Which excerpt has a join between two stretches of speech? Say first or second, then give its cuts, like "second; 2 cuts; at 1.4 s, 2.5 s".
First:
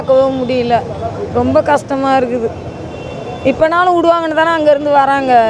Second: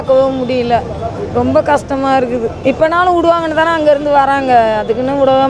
second; 1 cut; at 2.5 s